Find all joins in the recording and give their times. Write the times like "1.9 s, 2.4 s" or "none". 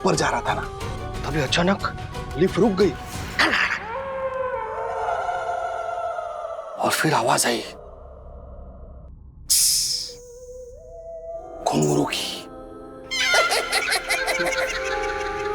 11.6 s